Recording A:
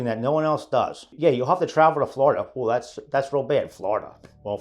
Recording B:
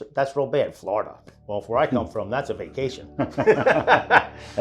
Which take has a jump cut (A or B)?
A